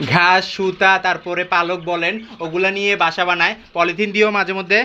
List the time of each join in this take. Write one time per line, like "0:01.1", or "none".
none